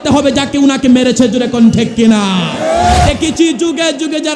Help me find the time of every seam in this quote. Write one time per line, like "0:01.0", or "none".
0:03.0